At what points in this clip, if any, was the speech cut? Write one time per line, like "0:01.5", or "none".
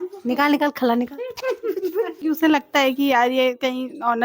0:02.2